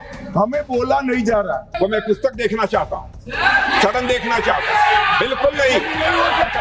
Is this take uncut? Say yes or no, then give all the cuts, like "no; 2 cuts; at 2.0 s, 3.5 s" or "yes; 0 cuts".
no; 1 cut; at 1.8 s